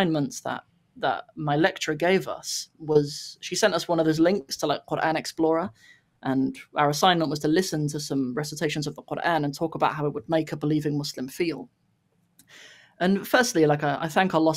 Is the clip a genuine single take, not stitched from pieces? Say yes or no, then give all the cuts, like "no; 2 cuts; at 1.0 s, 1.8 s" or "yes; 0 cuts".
yes; 0 cuts